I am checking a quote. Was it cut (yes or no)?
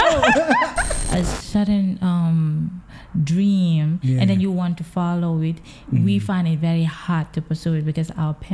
yes